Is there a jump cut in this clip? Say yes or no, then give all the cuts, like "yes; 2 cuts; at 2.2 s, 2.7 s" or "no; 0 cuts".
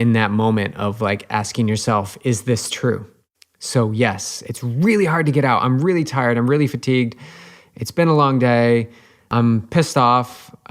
yes; 1 cut; at 9.3 s